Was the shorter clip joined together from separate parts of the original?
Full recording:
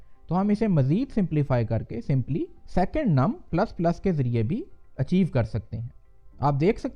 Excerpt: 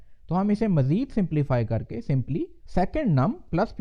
no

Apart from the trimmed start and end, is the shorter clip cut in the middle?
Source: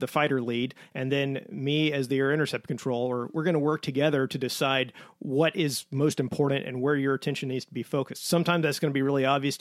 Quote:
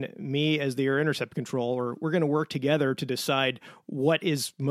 no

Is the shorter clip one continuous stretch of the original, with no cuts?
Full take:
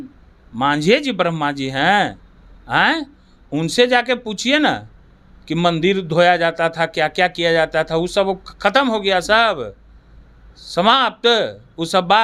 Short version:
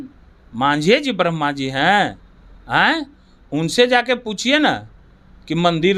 yes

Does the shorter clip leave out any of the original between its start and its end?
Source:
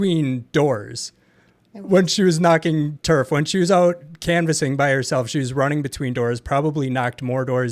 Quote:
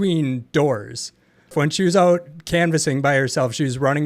yes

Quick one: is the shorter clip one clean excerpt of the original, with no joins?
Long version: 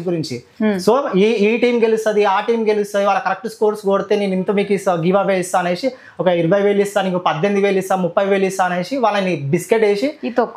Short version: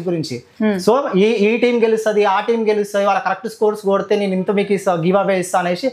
yes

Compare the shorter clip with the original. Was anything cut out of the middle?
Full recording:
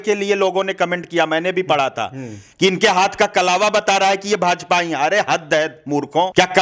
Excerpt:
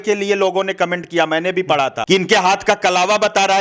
yes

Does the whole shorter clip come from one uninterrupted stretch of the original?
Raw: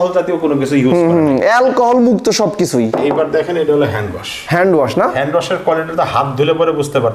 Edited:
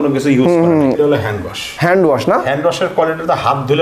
no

